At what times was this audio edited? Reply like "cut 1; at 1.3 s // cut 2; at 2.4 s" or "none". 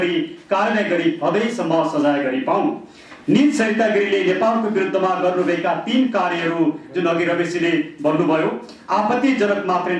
none